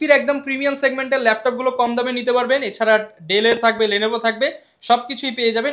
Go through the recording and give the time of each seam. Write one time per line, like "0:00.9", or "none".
none